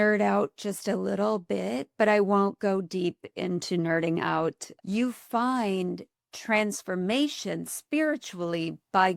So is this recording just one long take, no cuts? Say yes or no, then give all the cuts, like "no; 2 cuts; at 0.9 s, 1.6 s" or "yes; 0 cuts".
no; 1 cut; at 4.7 s